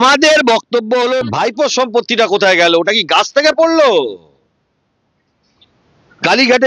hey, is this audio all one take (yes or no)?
no